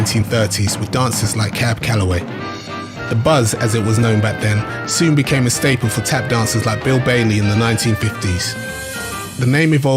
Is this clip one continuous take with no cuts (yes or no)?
no